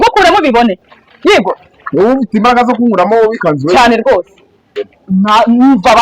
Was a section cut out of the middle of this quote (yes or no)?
yes